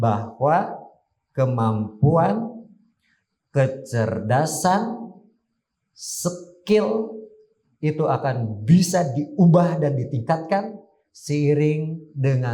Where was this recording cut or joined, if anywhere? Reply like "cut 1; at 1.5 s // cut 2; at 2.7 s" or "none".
none